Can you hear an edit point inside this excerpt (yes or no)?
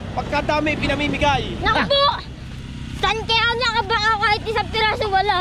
no